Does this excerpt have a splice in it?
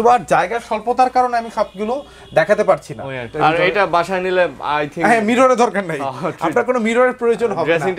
yes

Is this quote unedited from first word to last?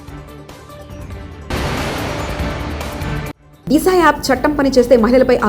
no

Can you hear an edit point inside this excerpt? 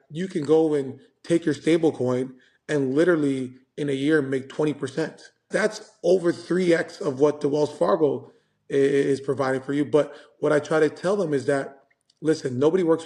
yes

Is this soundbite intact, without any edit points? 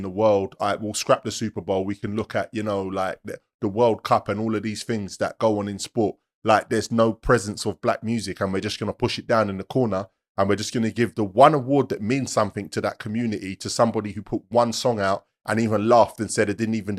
yes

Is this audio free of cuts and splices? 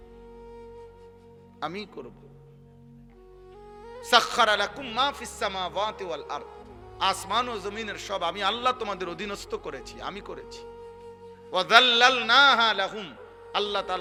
yes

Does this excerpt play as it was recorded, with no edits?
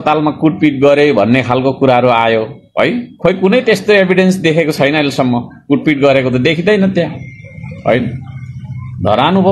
yes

